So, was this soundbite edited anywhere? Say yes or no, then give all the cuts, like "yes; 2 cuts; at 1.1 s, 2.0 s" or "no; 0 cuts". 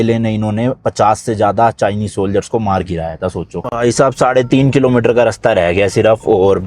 yes; 1 cut; at 3.6 s